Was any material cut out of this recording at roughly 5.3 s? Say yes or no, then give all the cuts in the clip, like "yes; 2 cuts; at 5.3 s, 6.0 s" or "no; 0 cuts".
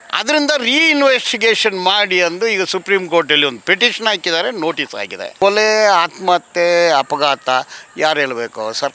yes; 1 cut; at 5.3 s